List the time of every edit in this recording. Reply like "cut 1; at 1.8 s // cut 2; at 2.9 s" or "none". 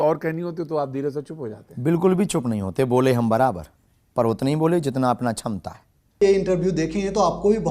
cut 1; at 6.2 s